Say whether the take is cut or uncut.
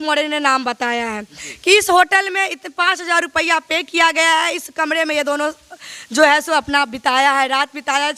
uncut